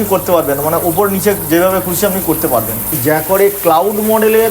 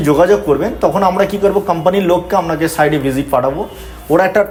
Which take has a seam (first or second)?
first